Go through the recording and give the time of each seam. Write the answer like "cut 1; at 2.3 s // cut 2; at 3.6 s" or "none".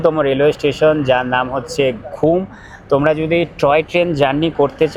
none